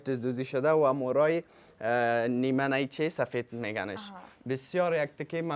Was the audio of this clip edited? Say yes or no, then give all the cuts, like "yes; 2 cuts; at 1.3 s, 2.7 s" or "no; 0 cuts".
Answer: no; 0 cuts